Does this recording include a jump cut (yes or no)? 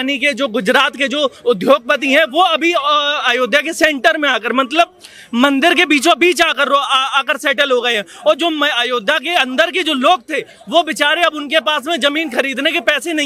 no